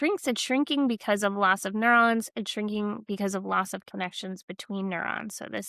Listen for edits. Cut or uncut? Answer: uncut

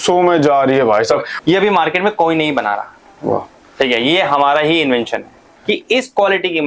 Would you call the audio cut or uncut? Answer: cut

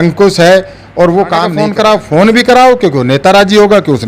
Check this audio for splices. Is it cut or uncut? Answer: cut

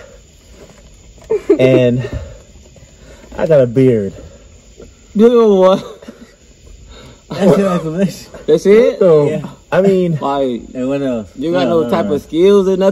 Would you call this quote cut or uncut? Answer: uncut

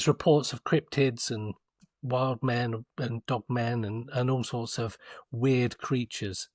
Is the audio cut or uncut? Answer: uncut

